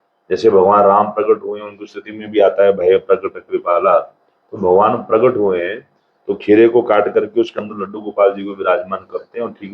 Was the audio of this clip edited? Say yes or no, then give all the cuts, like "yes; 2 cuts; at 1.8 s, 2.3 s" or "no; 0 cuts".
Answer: no; 0 cuts